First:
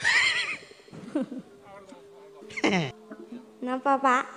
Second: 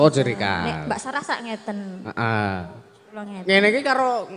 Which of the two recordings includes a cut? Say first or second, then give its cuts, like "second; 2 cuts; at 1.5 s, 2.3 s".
first; 1 cut; at 3.0 s